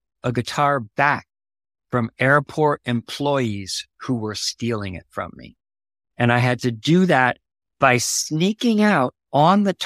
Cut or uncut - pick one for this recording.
uncut